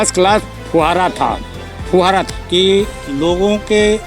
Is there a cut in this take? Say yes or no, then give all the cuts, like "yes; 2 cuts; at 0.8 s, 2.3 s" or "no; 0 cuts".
yes; 1 cut; at 2.3 s